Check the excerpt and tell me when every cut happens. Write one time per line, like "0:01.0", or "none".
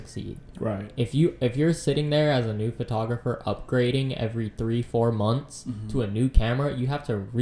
none